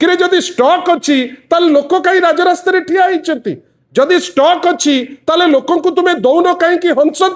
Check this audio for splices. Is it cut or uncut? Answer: uncut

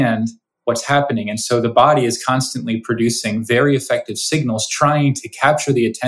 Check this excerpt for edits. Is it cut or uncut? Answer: uncut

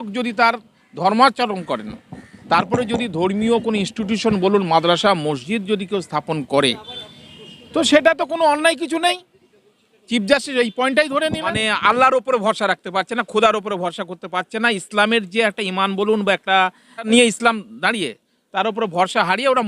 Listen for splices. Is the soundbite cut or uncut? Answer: cut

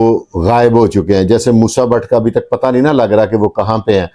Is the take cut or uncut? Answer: uncut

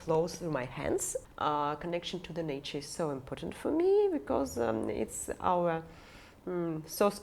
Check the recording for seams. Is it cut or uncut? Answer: cut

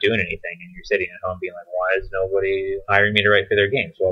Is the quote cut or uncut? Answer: cut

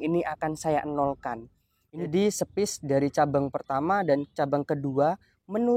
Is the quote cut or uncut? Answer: cut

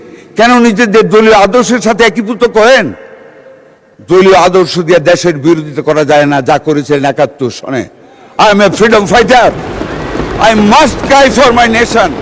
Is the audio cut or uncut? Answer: uncut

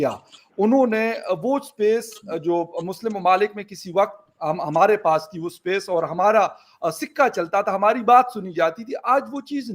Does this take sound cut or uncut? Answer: uncut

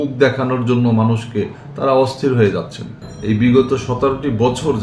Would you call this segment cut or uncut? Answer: cut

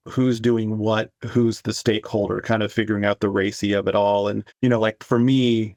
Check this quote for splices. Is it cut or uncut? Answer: uncut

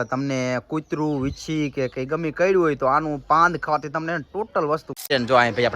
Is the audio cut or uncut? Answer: cut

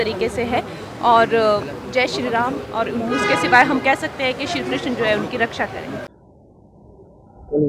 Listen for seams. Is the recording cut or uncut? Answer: cut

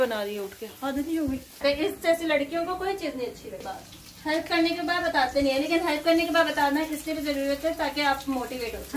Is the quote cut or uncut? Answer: cut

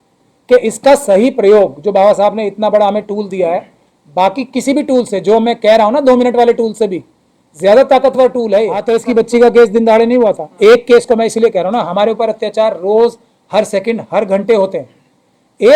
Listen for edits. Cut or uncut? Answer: cut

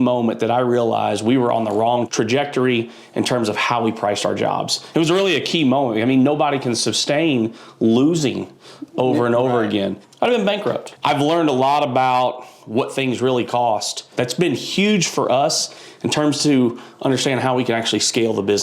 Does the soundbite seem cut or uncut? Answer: cut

